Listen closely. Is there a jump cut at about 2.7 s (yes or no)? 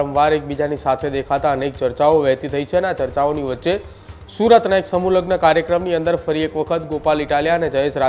no